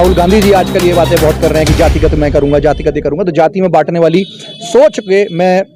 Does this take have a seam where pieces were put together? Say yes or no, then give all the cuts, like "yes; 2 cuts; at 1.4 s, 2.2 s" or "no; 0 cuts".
no; 0 cuts